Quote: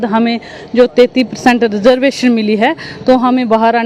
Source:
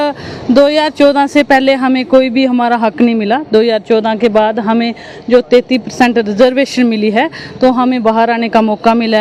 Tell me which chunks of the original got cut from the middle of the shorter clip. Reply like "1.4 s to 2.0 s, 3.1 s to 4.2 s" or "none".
none